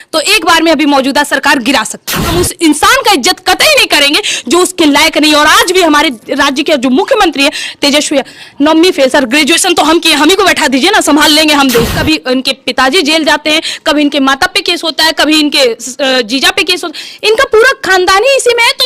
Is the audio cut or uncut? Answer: cut